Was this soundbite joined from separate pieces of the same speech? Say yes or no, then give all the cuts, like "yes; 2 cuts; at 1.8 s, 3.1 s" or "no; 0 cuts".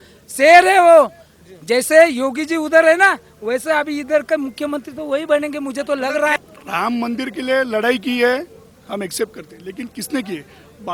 yes; 1 cut; at 6.4 s